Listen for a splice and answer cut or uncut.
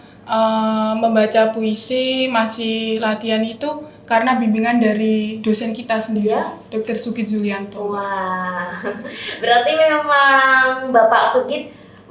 uncut